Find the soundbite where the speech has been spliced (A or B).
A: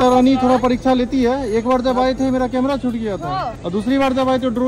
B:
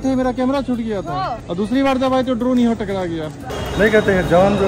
B